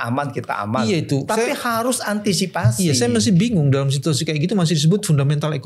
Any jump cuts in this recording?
no; 0 cuts

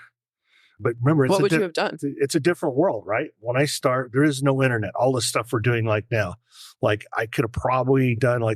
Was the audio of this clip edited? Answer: yes; 1 cut; at 2.0 s

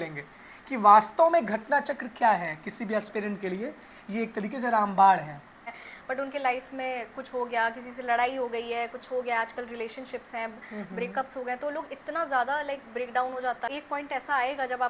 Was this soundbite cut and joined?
yes; 2 cuts; at 5.8 s, 13.7 s

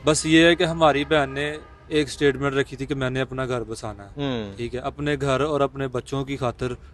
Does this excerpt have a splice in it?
no; 0 cuts

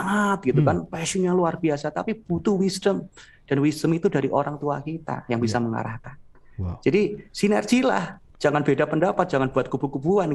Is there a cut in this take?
no; 0 cuts

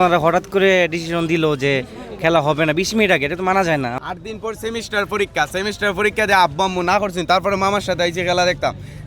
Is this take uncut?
no; 1 cut; at 4.0 s

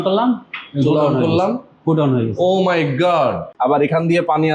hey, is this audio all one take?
no; 1 cut; at 3.5 s

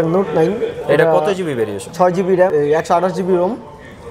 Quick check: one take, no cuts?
no; 1 cut; at 2.5 s

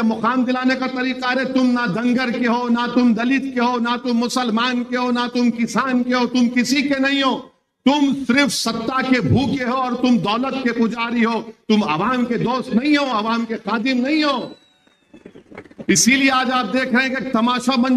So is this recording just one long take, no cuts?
yes; 0 cuts

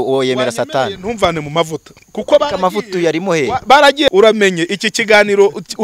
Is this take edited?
yes; 1 cut; at 4.1 s

